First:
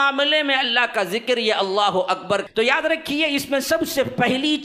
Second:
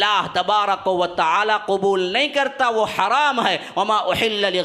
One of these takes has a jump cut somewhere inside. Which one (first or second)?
first